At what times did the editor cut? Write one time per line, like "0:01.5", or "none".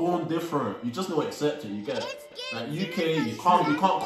0:02.3